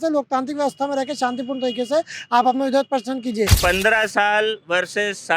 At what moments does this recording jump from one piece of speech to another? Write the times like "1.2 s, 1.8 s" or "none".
3.5 s